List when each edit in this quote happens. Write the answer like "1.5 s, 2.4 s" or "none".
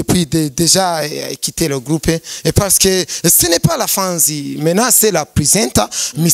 none